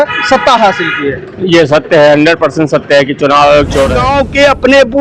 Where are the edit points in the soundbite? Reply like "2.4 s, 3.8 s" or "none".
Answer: 4.0 s